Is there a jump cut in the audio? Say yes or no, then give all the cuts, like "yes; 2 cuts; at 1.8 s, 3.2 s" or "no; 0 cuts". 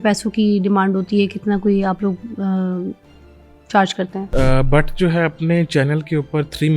yes; 1 cut; at 4.2 s